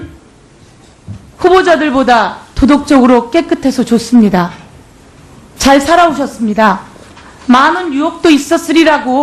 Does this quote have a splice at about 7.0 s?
no; 1 cut; at 2.4 s

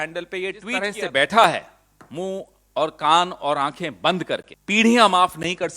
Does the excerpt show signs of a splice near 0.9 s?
yes; 2 cuts; at 0.9 s, 4.5 s

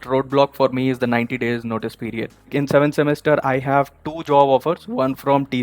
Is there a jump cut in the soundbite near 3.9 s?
no; 1 cut; at 2.4 s

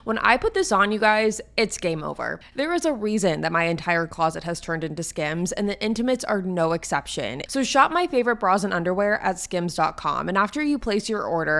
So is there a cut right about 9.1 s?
no; 2 cuts; at 2.4 s, 7.4 s

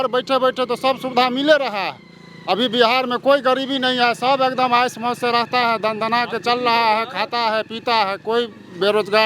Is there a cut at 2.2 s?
no; 0 cuts

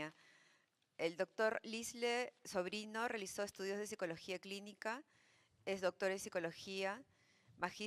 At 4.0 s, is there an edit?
yes; 1 cut; at 4.0 s

